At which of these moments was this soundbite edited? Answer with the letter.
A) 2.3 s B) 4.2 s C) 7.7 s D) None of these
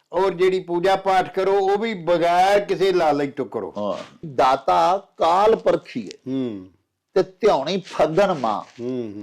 B